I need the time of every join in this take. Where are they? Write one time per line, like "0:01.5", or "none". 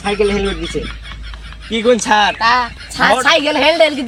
none